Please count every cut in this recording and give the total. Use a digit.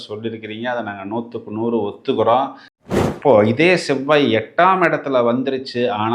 1